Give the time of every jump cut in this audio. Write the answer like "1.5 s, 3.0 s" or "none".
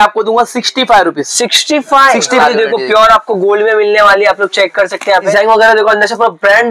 2.4 s, 5.3 s